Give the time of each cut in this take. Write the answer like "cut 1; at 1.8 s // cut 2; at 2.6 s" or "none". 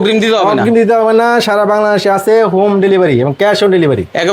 none